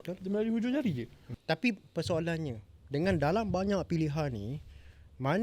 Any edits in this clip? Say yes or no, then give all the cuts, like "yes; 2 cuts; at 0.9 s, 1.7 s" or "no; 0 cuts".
yes; 1 cut; at 1.3 s